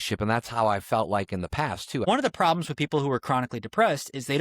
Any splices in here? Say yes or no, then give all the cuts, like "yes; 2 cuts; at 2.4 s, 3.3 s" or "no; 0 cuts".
yes; 1 cut; at 2.0 s